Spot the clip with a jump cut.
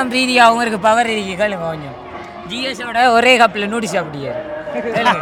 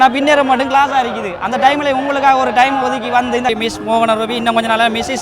second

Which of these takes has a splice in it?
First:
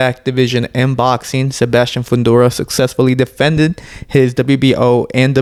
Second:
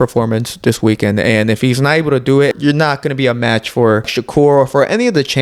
second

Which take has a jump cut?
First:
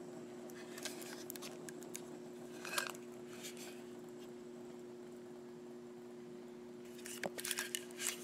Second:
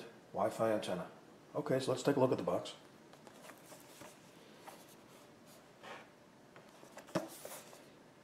first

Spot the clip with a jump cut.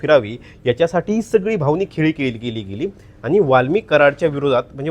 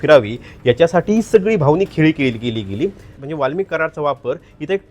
second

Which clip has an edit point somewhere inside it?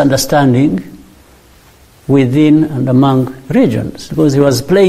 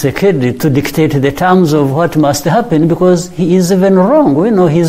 first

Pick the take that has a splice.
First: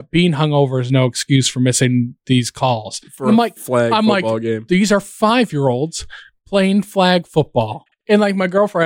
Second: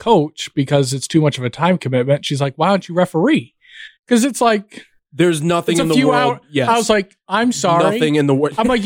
first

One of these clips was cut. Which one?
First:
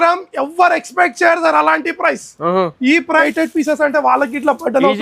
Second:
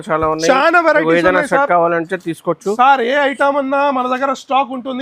first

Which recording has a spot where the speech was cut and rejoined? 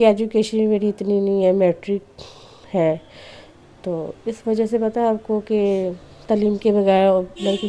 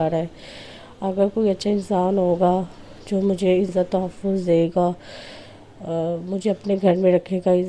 second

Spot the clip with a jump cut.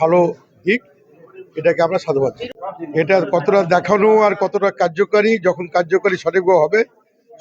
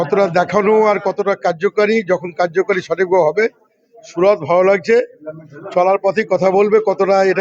first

